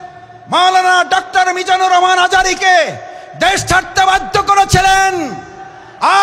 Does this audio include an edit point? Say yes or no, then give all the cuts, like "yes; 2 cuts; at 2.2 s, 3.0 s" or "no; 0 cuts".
no; 0 cuts